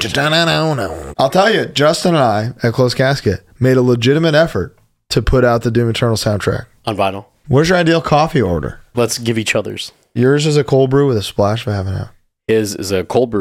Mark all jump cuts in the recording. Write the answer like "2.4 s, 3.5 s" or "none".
1.0 s, 7.3 s, 8.9 s, 10.1 s

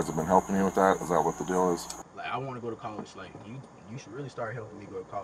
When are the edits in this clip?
2.0 s

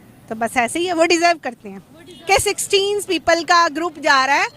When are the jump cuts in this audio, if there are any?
2.1 s

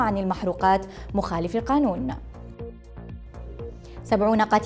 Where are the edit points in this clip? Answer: 2.1 s, 3.7 s

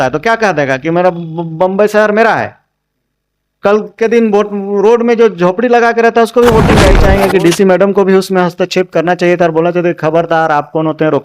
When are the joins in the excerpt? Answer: 7.0 s

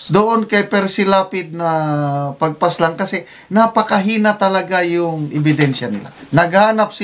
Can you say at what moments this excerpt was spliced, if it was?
6.1 s

